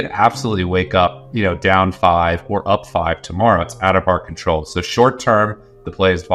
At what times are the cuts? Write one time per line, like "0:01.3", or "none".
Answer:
none